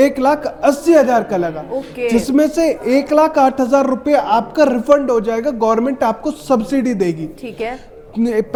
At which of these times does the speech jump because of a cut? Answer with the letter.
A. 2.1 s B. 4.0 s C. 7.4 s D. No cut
D